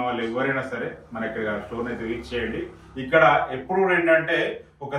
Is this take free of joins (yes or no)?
yes